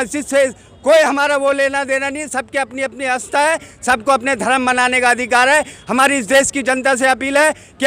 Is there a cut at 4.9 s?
no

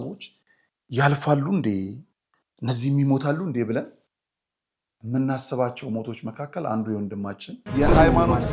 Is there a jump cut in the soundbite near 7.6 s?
yes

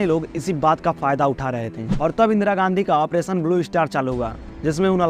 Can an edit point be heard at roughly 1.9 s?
yes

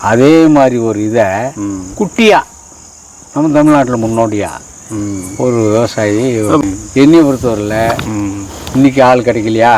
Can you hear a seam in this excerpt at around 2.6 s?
no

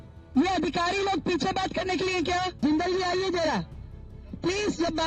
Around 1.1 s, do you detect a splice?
no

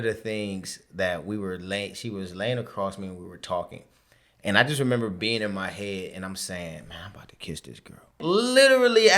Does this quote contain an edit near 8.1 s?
yes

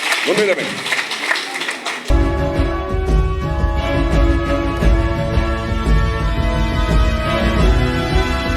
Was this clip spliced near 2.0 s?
yes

